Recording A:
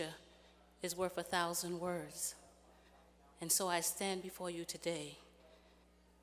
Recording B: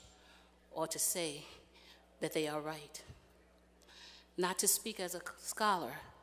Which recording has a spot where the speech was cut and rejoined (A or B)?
A